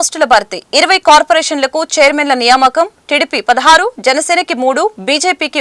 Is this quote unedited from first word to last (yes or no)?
yes